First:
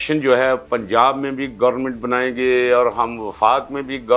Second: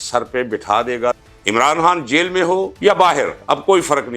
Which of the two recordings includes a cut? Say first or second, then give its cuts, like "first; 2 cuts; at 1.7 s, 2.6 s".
second; 2 cuts; at 1.2 s, 2.7 s